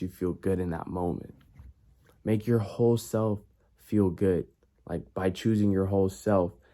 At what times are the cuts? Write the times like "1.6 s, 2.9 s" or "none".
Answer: none

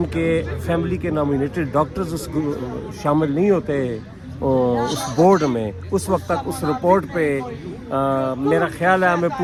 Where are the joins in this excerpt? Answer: none

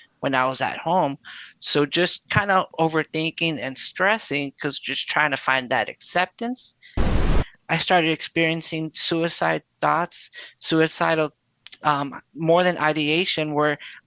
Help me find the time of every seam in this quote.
7.2 s

